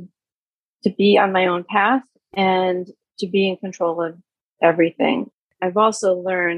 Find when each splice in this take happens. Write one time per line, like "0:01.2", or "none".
0:05.4